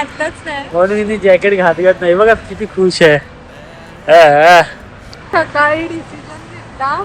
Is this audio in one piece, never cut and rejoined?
no; 1 cut; at 5.2 s

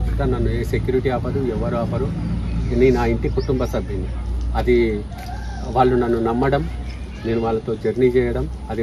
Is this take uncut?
yes; 0 cuts

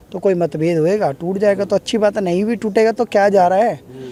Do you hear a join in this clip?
no; 0 cuts

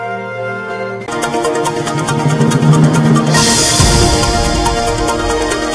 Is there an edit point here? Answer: no; 0 cuts

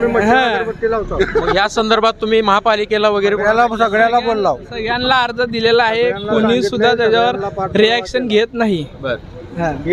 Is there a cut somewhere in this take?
no; 0 cuts

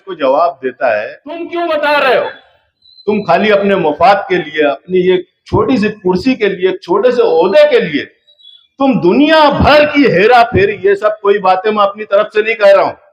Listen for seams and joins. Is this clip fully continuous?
no; 1 cut; at 1.5 s

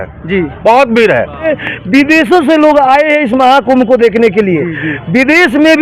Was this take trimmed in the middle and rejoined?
yes; 1 cut; at 1.6 s

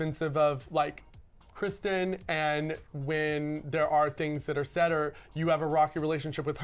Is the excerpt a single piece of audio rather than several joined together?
yes; 0 cuts

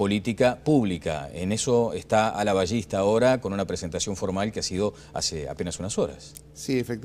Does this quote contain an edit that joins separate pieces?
yes; 1 cut; at 6.1 s

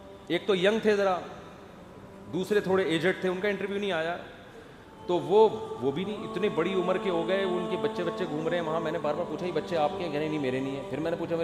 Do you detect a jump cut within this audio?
no; 0 cuts

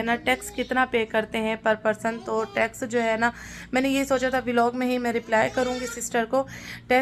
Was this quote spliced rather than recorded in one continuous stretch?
no; 0 cuts

